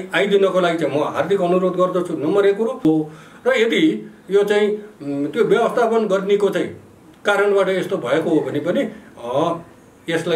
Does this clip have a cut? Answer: yes; 1 cut; at 2.8 s

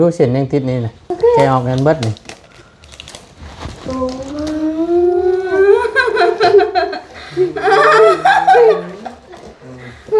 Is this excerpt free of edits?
no; 1 cut; at 1.1 s

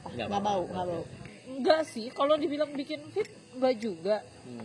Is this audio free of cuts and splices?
no; 1 cut; at 1.3 s

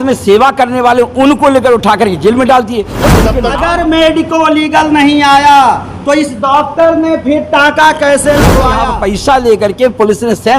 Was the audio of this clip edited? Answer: yes; 2 cuts; at 2.9 s, 8.8 s

